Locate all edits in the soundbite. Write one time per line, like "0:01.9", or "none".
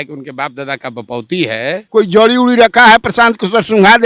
0:01.8